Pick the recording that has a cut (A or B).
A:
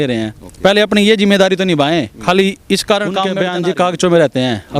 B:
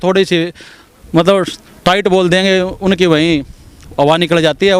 A